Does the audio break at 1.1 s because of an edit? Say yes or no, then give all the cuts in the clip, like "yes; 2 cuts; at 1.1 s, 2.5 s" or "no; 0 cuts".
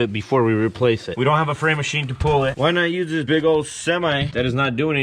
yes; 2 cuts; at 1.1 s, 2.5 s